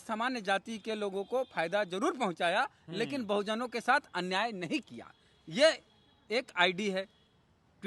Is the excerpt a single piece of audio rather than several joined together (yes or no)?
yes